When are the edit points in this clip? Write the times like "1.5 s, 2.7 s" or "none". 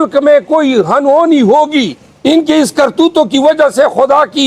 2.0 s